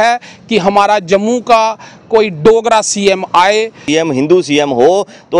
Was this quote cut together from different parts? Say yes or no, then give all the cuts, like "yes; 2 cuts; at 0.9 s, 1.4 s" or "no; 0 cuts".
yes; 1 cut; at 3.8 s